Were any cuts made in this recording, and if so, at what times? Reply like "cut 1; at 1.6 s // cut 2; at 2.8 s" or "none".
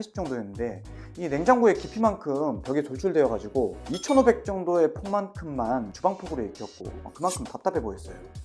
none